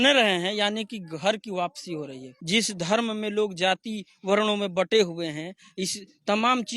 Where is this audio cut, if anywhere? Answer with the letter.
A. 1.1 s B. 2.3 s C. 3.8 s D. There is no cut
B